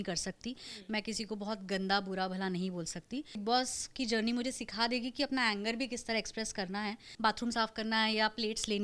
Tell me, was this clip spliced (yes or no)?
yes